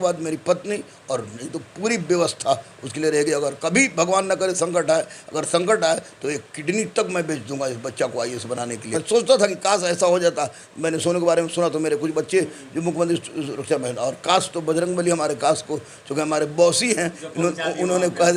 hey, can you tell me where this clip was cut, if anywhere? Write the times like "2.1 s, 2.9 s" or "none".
9.0 s